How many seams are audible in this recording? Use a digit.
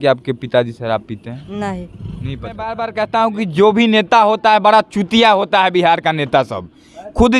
1